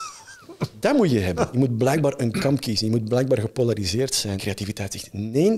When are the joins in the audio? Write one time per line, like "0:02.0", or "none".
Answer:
0:01.5
0:04.4